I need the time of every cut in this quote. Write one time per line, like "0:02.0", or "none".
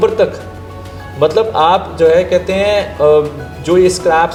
none

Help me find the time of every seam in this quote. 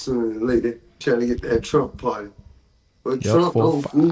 0:00.9

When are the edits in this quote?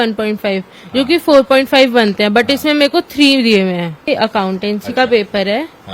0:04.1

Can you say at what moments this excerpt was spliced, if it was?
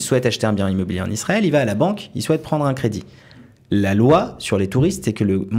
none

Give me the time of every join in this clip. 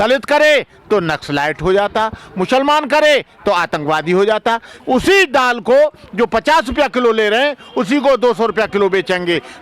0:04.7

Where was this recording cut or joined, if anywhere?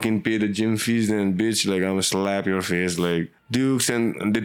0:03.4

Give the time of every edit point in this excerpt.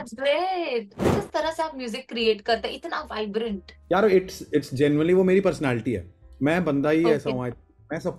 0:01.2
0:03.7

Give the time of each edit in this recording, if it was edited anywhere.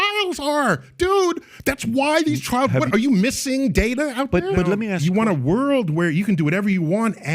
0:04.8

